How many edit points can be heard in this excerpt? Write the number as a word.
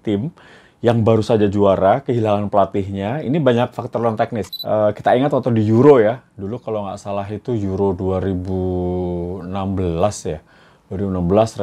one